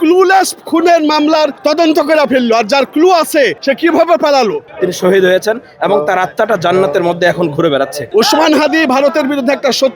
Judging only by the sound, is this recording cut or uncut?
cut